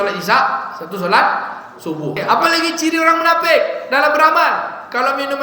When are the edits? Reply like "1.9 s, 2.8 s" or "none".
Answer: 2.2 s

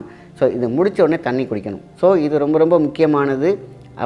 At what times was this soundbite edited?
1.8 s

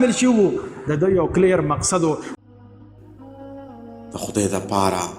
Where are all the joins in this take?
2.4 s

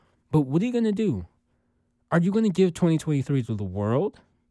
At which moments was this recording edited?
none

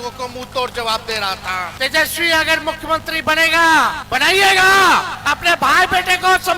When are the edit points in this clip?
1.7 s, 4.0 s, 5.1 s

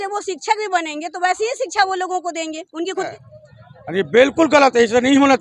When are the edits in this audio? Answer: 3.2 s

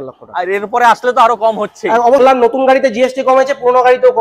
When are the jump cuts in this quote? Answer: 2.2 s

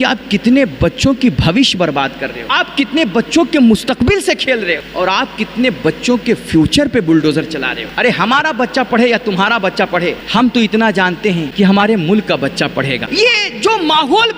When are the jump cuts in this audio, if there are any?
2.4 s, 4.9 s, 7.8 s, 10.2 s, 11.5 s, 13.0 s

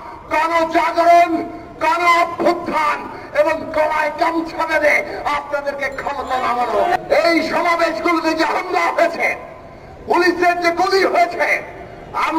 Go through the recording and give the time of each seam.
7.0 s

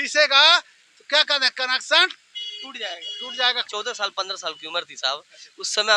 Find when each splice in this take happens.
3.6 s

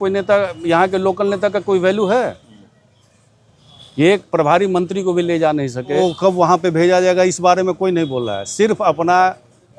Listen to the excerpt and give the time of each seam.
6.0 s

